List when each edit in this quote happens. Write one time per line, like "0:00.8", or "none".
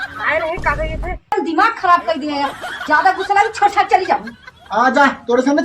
0:01.3